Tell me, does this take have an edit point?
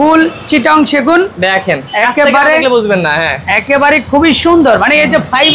no; 0 cuts

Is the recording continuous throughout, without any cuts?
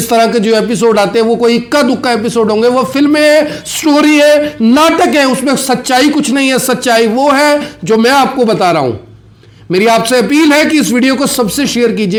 yes; 0 cuts

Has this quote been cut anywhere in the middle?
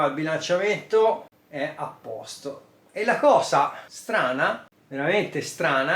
yes; 3 cuts; at 1.4 s, 3.9 s, 4.8 s

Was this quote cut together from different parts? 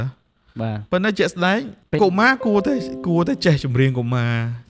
yes; 1 cut; at 1.8 s

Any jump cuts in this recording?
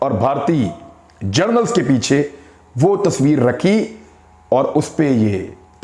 no; 0 cuts

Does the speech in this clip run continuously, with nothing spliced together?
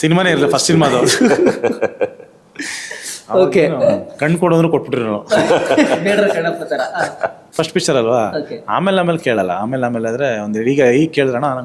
yes; 0 cuts

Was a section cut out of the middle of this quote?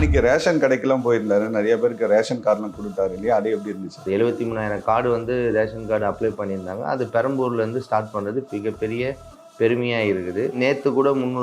yes; 2 cuts; at 4.1 s, 10.6 s

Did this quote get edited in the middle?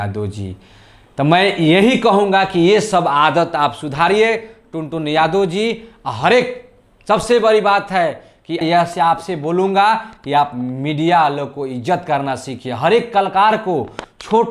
yes; 1 cut; at 8.6 s

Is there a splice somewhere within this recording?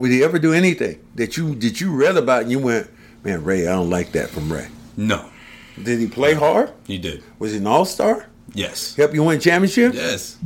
no; 0 cuts

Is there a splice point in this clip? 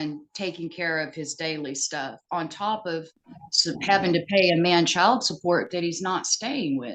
no; 0 cuts

